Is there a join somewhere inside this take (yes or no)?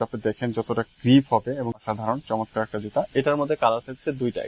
yes